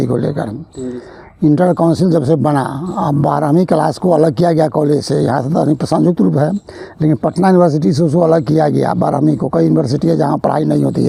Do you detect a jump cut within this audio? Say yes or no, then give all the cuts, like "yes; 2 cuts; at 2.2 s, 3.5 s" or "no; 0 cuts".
no; 0 cuts